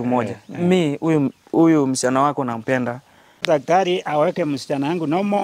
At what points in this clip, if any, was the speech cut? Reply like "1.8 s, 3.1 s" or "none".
3.4 s